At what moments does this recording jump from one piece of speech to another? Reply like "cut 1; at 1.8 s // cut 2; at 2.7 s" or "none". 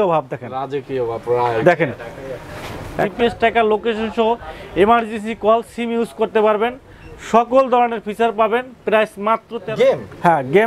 cut 1; at 3.0 s // cut 2; at 9.6 s